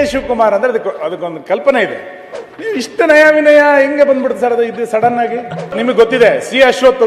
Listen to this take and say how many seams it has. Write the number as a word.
one